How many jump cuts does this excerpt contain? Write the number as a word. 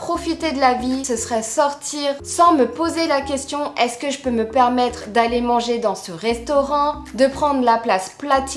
two